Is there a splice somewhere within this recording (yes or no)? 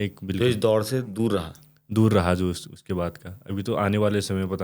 no